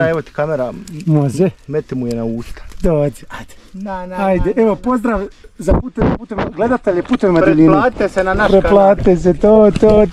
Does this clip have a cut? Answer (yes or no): no